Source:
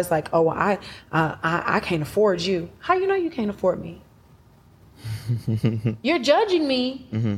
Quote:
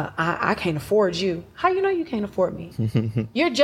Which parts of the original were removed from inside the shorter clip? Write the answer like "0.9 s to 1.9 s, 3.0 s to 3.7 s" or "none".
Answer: 3.9 s to 5.3 s